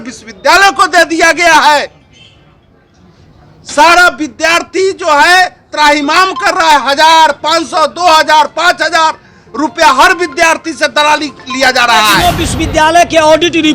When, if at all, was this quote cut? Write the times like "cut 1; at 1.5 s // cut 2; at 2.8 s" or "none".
cut 1; at 12.2 s